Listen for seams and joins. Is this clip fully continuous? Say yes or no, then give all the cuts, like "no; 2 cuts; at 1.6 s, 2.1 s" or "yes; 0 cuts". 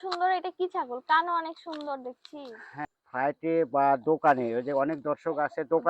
no; 1 cut; at 2.8 s